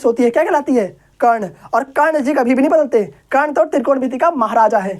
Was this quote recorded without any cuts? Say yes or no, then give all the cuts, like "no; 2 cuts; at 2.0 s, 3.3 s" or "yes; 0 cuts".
yes; 0 cuts